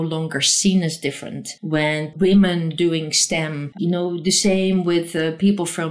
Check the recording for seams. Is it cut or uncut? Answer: cut